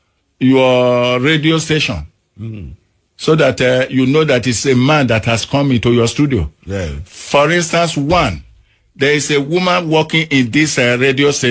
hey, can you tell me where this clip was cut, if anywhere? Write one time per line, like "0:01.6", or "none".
none